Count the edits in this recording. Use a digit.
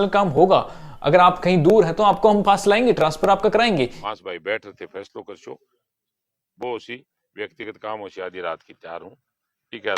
0